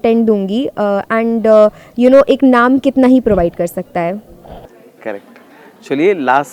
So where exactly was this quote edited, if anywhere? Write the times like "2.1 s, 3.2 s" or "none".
none